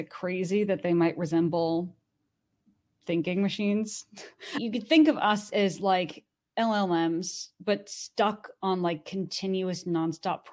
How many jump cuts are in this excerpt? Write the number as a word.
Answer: one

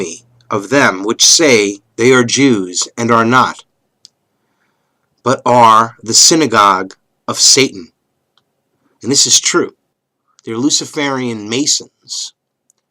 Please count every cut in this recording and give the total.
one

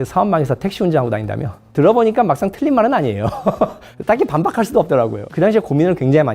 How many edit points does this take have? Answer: one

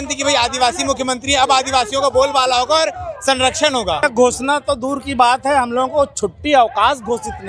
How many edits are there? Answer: one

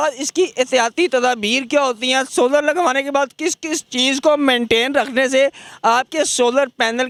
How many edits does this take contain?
zero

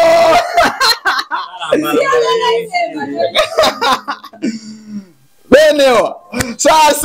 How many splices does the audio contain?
zero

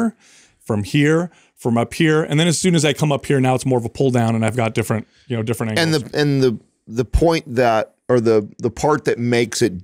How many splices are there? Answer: zero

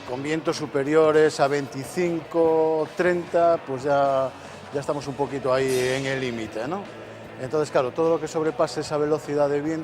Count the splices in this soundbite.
zero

